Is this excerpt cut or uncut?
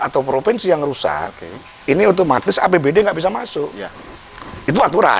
uncut